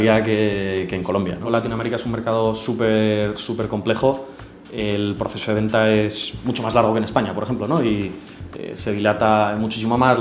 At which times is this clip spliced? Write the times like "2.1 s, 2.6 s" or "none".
1.5 s